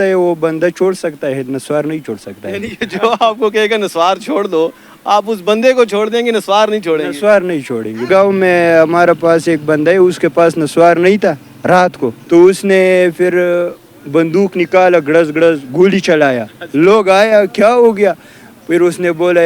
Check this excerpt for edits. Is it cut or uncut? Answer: cut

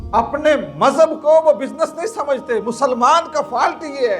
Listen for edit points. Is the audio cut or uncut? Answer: uncut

